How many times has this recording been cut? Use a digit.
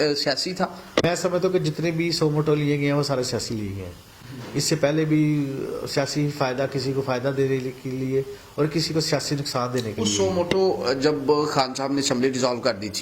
1